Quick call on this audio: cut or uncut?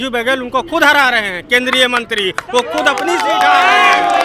uncut